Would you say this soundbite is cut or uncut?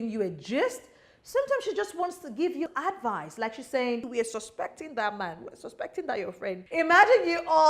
cut